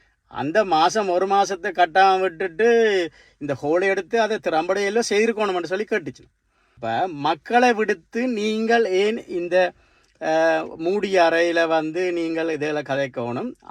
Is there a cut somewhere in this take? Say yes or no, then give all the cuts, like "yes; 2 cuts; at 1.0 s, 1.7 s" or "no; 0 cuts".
yes; 1 cut; at 6.8 s